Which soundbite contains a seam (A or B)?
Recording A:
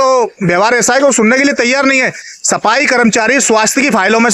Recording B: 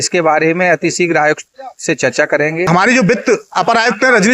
B